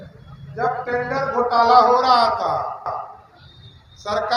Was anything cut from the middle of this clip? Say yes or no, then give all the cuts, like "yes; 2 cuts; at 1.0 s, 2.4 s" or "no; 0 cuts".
no; 0 cuts